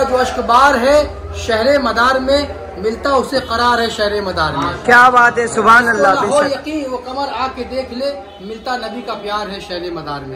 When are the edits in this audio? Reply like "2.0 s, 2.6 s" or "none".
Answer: none